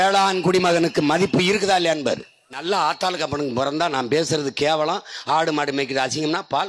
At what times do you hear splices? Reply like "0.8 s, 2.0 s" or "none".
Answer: 2.6 s